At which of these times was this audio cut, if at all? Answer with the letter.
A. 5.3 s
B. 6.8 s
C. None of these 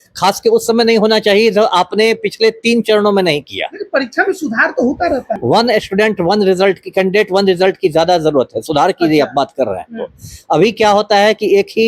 A